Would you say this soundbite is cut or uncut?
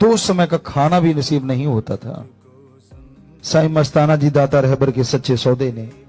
uncut